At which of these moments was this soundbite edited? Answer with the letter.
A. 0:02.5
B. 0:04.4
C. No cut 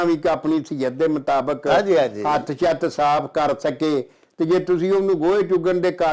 C